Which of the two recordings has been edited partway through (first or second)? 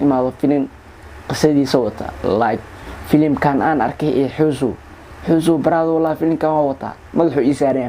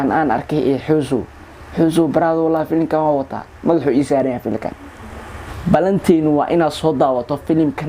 second